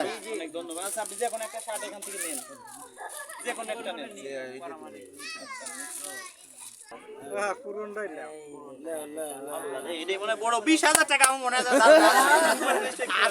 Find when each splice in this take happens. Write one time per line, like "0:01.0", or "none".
0:07.0